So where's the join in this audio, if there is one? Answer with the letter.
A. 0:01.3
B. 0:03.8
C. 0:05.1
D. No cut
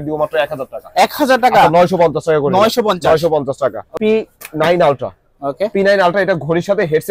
B